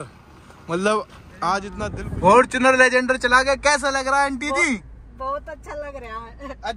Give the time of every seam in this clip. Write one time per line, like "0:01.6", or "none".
0:01.8